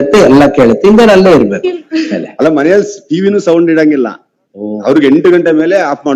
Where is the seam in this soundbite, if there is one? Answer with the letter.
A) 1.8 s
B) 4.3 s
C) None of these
A